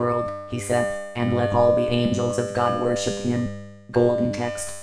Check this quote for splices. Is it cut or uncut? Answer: cut